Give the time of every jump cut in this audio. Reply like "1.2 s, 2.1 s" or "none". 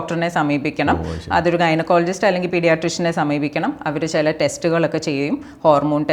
none

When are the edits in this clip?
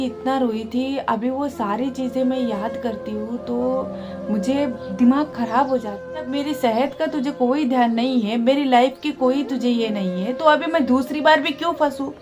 6.3 s

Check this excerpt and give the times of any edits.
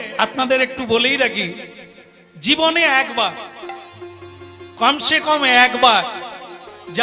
none

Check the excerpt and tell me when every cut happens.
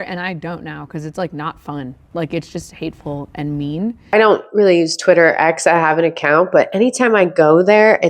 4.0 s

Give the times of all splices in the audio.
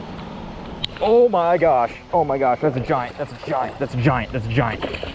2.0 s

